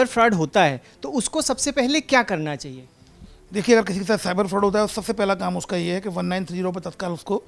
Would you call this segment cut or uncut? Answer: uncut